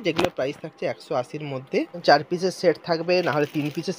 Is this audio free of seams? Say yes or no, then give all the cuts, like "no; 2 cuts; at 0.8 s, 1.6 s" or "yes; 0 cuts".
no; 1 cut; at 2.0 s